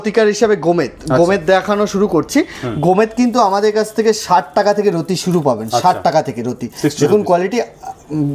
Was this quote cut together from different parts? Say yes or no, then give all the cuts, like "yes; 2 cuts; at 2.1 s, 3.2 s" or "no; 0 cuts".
no; 0 cuts